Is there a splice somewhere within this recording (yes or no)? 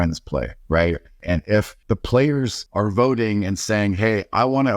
yes